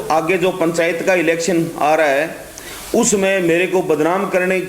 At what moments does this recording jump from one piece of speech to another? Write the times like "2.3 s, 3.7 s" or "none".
none